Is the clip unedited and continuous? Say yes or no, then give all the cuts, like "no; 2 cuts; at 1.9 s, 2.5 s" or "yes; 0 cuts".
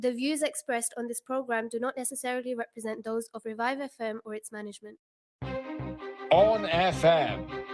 no; 1 cut; at 5.2 s